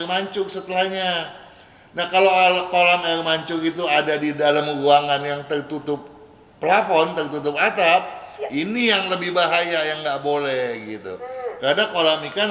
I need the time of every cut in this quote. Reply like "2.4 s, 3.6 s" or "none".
none